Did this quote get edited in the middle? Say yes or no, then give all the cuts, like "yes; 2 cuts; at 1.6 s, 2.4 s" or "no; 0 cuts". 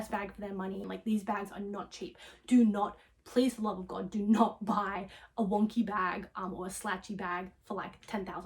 yes; 1 cut; at 0.9 s